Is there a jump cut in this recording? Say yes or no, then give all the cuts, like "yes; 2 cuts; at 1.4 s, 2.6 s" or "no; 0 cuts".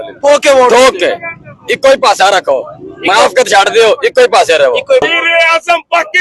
yes; 1 cut; at 5.0 s